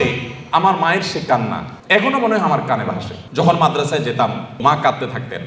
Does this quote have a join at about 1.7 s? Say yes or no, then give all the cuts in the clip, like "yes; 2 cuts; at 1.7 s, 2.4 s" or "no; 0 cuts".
yes; 3 cuts; at 1.7 s, 3.1 s, 4.6 s